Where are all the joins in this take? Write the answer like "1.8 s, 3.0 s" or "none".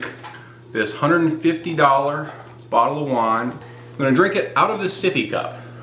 3.6 s